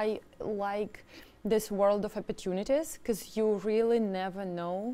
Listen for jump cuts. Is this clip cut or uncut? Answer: uncut